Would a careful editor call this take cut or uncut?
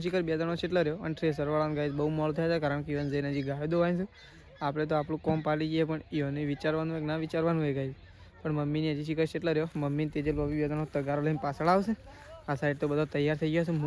uncut